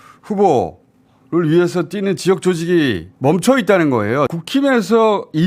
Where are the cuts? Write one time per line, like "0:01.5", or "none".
0:04.3